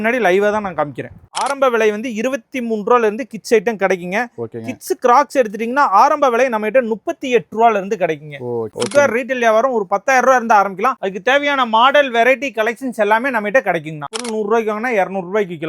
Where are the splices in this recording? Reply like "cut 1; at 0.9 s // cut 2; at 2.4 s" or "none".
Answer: cut 1; at 1.4 s // cut 2; at 8.7 s // cut 3; at 14.2 s